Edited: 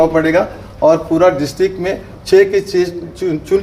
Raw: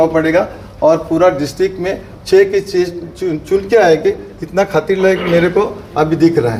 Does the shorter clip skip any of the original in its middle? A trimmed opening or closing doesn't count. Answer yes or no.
no